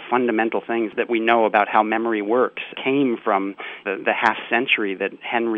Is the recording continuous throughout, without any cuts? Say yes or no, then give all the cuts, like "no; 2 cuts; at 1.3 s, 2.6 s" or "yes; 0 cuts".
no; 2 cuts; at 0.9 s, 2.7 s